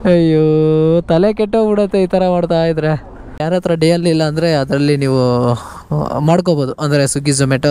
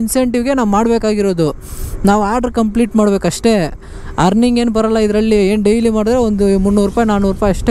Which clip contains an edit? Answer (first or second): first